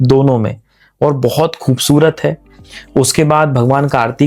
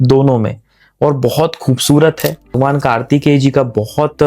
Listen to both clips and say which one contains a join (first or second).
second